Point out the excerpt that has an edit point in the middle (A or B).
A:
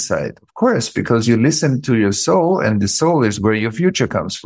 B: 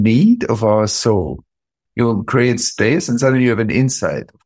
B